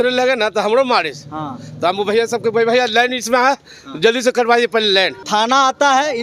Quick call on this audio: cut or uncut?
cut